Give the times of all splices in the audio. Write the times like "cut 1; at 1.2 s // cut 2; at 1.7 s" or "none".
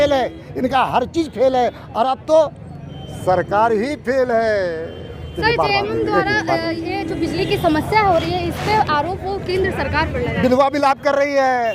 none

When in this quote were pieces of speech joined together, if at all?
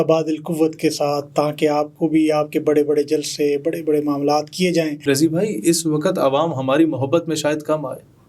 cut 1; at 5.0 s

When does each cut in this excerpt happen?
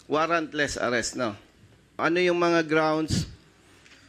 cut 1; at 2.0 s

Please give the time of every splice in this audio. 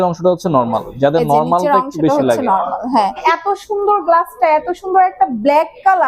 cut 1; at 3.2 s

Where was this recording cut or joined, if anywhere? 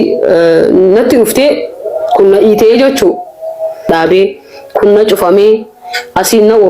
cut 1; at 3.9 s

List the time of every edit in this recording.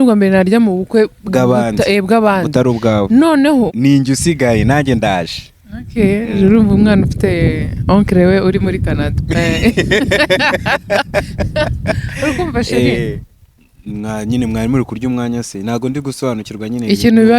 cut 1; at 3.7 s // cut 2; at 13.2 s

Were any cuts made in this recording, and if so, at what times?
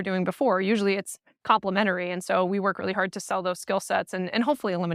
none

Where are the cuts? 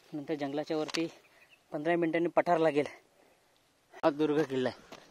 cut 1; at 4.0 s

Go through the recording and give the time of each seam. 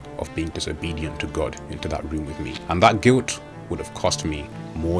cut 1; at 2.6 s

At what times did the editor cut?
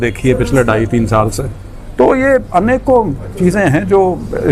none

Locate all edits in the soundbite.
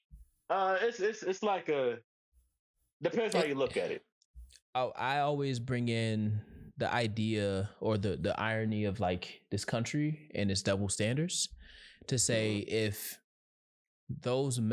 cut 1; at 4.1 s

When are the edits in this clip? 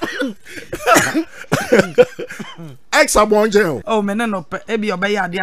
cut 1; at 3.8 s

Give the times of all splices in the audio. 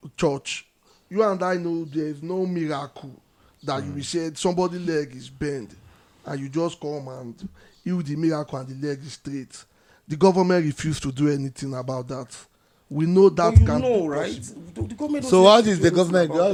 none

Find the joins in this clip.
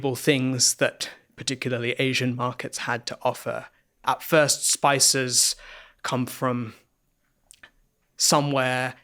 cut 1; at 3.8 s

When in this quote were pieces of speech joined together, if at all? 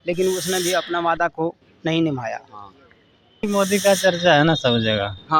cut 1; at 3.5 s

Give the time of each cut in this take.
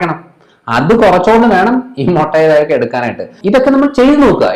cut 1; at 3.3 s

